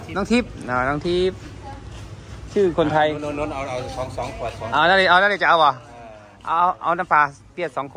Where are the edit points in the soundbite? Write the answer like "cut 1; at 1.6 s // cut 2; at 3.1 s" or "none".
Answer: none

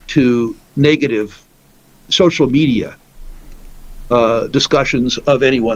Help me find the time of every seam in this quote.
none

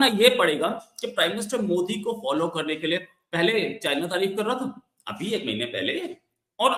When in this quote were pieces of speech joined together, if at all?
none

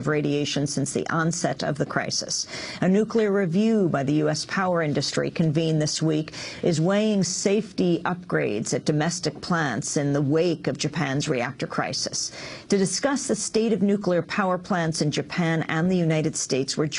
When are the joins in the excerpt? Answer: cut 1; at 1.0 s

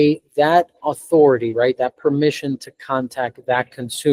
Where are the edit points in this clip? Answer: none

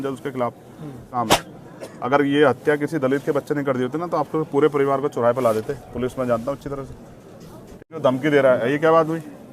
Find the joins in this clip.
cut 1; at 1.1 s // cut 2; at 7.9 s

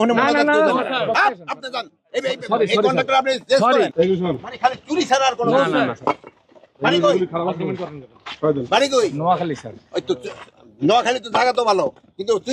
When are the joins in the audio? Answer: cut 1; at 3.9 s

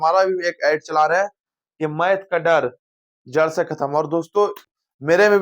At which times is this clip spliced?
cut 1; at 4.3 s

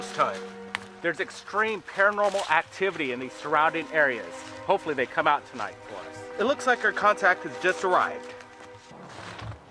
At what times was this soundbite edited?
none

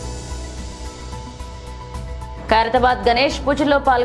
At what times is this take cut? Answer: cut 1; at 1.0 s

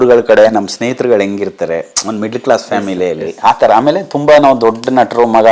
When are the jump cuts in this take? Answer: none

